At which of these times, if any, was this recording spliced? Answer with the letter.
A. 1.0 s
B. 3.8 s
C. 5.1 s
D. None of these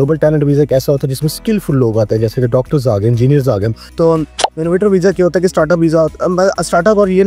B